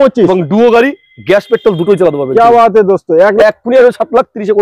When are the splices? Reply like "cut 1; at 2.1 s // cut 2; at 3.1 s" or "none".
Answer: cut 1; at 3.4 s